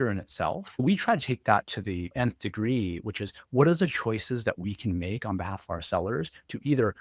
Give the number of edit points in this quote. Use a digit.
2